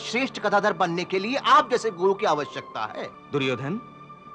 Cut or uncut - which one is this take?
cut